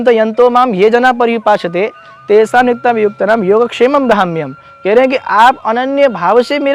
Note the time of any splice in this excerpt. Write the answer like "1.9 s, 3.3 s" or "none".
none